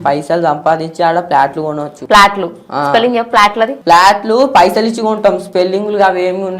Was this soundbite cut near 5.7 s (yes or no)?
no